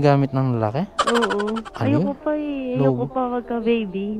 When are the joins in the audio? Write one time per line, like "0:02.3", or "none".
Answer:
0:01.7